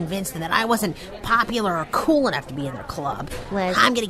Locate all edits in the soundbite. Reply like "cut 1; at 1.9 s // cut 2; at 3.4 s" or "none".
none